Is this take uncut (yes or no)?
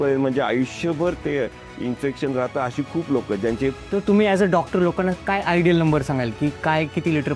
no